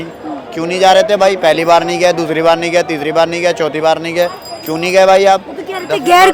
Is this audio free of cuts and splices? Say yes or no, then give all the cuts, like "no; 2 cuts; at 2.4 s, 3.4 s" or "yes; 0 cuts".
yes; 0 cuts